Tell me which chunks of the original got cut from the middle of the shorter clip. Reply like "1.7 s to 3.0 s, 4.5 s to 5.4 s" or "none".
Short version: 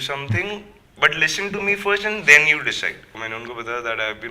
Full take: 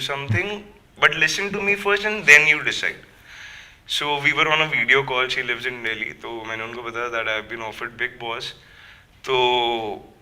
3.2 s to 6.5 s